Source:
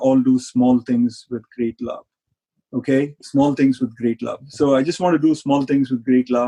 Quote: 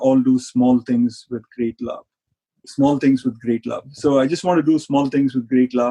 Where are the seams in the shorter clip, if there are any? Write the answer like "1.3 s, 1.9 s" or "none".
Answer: 2.6 s